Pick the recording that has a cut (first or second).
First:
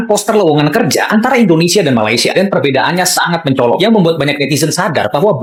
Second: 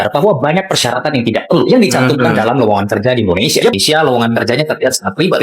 second